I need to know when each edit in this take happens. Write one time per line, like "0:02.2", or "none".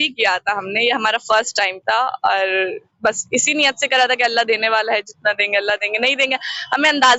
none